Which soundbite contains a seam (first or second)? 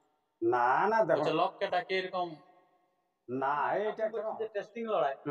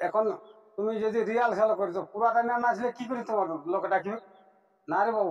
first